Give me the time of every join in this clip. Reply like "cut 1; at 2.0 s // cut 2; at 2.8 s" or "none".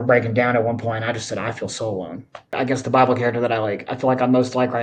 cut 1; at 2.5 s